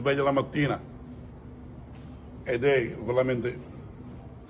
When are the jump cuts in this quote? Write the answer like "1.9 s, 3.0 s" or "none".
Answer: none